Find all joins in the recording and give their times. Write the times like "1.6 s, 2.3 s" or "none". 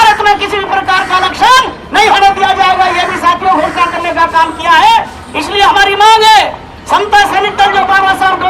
none